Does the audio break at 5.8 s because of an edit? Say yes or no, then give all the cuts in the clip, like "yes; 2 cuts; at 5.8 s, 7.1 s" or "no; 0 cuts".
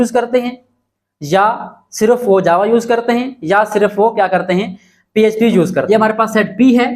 yes; 1 cut; at 5.8 s